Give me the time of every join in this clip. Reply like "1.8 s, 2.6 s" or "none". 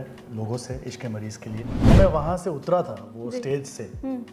1.9 s